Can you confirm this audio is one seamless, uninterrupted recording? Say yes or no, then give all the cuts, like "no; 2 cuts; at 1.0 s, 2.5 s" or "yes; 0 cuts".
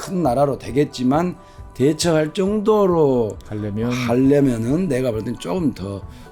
yes; 0 cuts